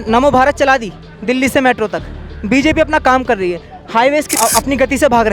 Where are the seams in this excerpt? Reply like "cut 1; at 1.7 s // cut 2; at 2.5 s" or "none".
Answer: cut 1; at 4.4 s